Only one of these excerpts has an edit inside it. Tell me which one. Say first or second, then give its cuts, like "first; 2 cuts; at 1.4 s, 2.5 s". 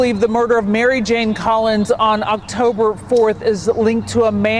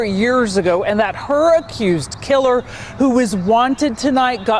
second; 1 cut; at 1.7 s